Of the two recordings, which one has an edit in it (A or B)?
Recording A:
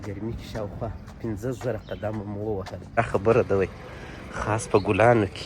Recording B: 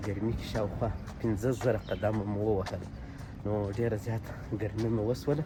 A